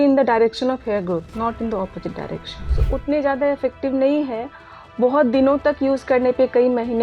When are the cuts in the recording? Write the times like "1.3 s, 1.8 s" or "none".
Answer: 2.8 s